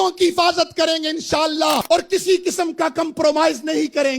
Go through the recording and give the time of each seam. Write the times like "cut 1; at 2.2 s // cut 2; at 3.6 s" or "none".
cut 1; at 1.8 s